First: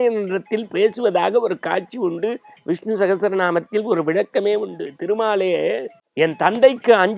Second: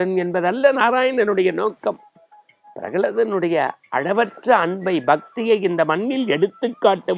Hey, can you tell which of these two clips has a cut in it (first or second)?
first